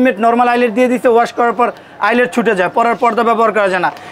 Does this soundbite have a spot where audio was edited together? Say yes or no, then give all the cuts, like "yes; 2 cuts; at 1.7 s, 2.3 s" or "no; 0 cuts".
no; 0 cuts